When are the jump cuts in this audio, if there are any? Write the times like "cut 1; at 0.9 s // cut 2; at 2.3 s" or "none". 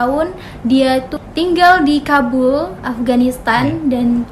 cut 1; at 1.1 s